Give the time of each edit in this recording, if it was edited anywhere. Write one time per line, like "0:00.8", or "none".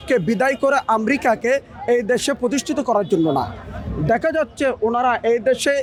none